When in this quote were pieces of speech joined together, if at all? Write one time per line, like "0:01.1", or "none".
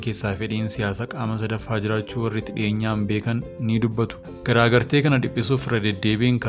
0:03.9